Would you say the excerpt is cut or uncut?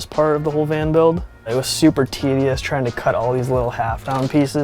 uncut